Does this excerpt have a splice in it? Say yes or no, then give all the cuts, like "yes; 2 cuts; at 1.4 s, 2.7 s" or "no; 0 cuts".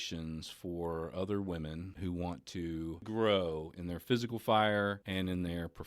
yes; 3 cuts; at 1.9 s, 3.0 s, 5.0 s